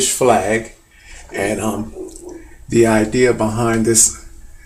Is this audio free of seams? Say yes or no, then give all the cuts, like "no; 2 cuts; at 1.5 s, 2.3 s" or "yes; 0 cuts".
yes; 0 cuts